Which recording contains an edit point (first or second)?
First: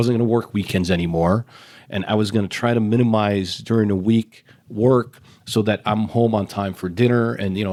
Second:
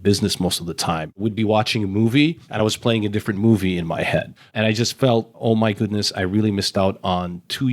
second